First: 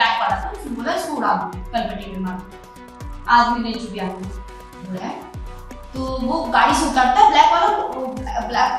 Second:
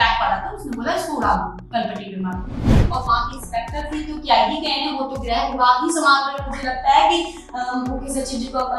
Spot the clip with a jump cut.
second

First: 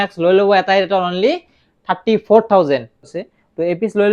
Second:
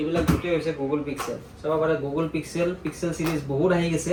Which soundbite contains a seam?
first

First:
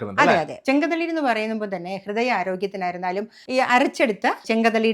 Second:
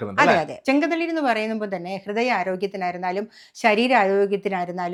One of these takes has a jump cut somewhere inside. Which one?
first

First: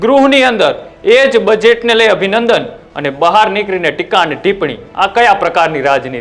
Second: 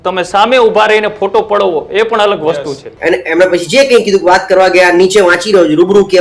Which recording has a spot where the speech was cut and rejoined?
second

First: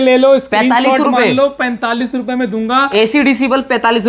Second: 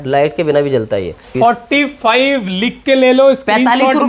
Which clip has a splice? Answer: second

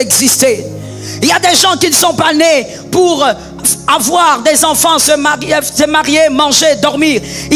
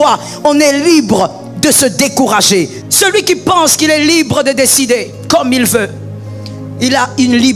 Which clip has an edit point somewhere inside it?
second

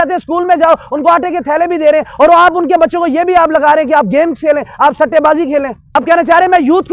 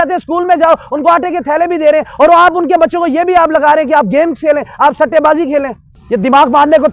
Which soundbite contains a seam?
second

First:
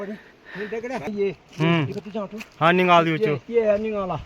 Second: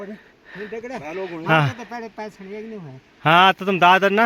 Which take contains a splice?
first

